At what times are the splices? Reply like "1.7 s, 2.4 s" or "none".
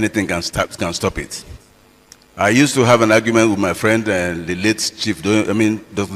none